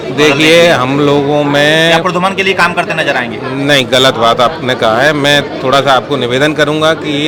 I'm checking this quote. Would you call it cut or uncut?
uncut